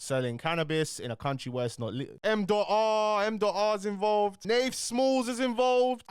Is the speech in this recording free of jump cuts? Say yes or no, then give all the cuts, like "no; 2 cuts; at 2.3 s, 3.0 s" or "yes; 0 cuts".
no; 1 cut; at 2.1 s